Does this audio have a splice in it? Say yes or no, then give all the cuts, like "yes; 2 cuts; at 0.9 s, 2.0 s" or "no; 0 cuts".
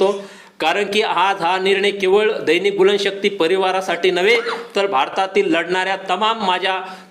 no; 0 cuts